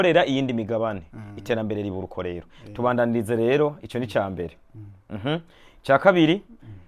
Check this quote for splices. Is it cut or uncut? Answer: uncut